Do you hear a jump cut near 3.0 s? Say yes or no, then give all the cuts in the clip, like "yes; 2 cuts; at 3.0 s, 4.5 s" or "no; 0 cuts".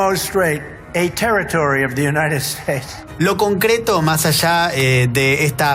yes; 1 cut; at 3.0 s